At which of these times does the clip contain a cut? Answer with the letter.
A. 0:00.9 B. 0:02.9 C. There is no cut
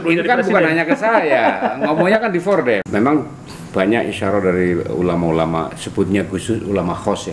B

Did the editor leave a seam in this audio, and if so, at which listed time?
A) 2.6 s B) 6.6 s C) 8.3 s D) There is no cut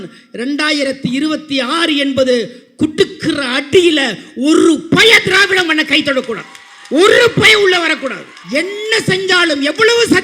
C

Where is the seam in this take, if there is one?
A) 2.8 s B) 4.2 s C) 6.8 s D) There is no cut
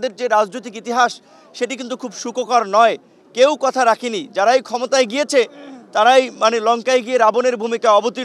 D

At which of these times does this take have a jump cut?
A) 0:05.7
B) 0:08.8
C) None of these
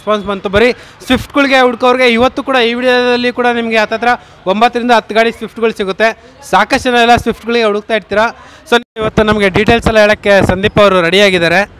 B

